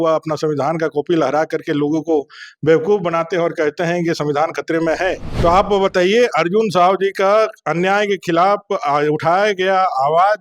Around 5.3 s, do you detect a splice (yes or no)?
yes